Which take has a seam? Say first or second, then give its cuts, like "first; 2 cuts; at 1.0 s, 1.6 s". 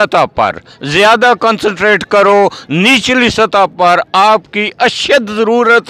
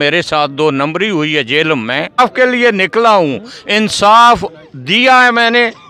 second; 1 cut; at 2.2 s